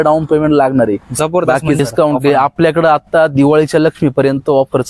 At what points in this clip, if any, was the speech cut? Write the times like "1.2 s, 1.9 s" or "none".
1.8 s